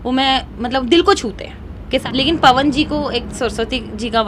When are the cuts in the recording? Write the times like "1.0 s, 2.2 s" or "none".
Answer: 2.0 s